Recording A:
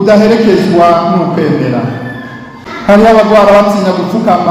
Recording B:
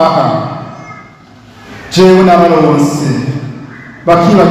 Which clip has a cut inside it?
A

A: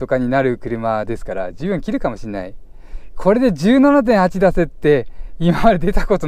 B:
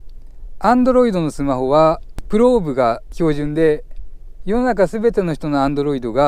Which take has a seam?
B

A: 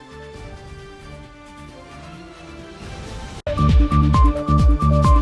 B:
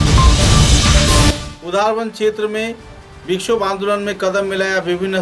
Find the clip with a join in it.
B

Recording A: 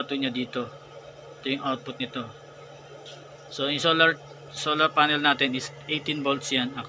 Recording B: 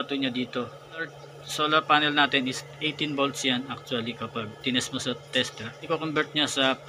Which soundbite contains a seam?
B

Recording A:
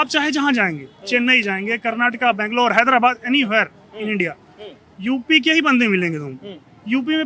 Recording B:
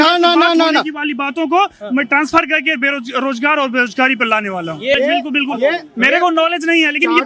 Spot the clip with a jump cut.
B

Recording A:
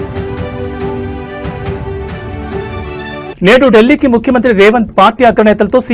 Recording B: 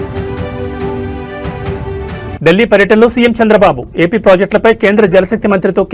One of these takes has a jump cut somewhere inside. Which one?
B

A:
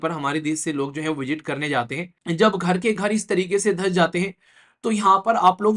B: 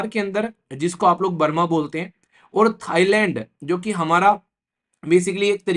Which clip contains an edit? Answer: A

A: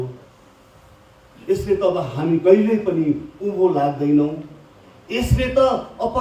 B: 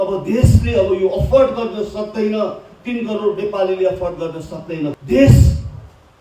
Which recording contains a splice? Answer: B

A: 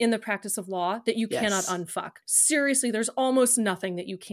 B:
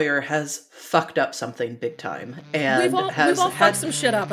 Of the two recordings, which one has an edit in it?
A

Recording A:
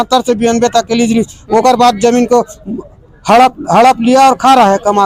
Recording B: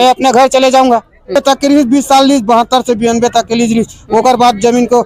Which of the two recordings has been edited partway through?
B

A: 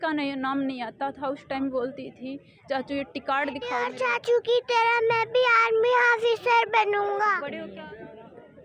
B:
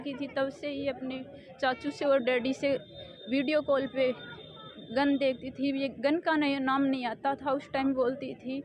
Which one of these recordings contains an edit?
A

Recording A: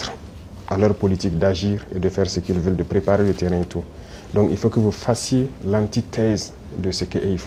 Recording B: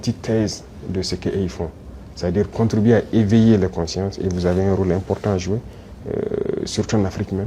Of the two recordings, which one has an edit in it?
B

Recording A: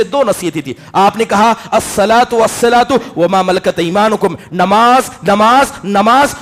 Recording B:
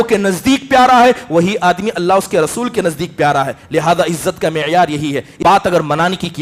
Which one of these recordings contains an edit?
B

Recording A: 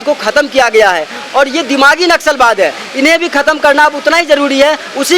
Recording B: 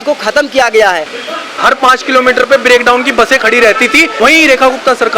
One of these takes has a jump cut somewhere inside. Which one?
B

